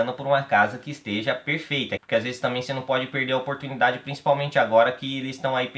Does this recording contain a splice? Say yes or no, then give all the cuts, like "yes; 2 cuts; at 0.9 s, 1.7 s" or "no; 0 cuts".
yes; 1 cut; at 2.0 s